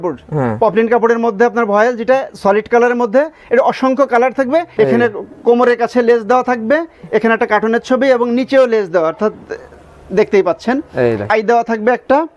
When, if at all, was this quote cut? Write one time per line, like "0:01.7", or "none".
0:04.7
0:11.3